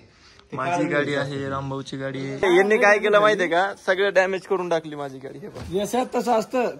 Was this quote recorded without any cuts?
no; 1 cut; at 2.4 s

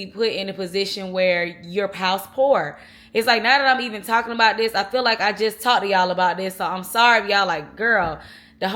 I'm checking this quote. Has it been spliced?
no; 0 cuts

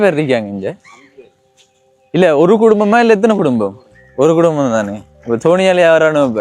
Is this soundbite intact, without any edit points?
yes; 0 cuts

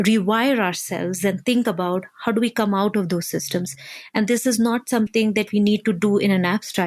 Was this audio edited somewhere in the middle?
no; 0 cuts

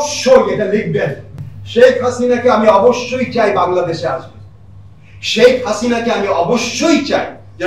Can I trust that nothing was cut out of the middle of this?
yes; 0 cuts

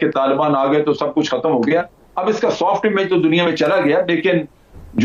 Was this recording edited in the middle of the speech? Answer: no; 0 cuts

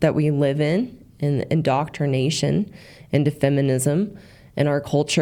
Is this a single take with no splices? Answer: yes; 0 cuts

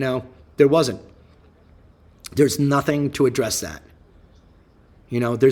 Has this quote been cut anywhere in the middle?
no; 0 cuts

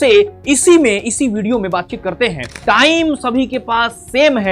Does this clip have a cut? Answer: yes; 1 cut; at 2.5 s

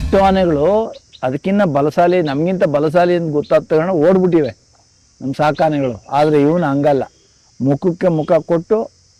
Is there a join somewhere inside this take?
no; 0 cuts

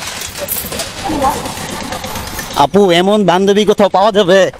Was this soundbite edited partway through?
no; 0 cuts

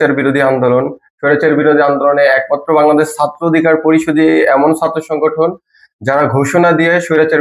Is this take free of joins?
yes; 0 cuts

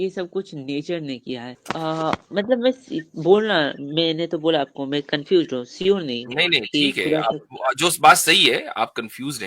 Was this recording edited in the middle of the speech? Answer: yes; 1 cut; at 1.5 s

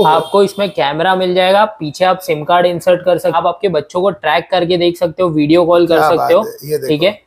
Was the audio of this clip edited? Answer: yes; 1 cut; at 3.4 s

